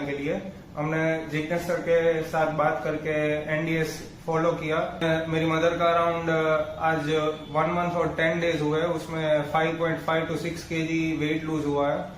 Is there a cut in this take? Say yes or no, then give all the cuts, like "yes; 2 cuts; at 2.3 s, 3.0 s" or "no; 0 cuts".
yes; 1 cut; at 5.0 s